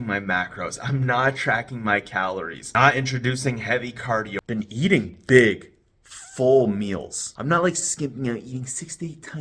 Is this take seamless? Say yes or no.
no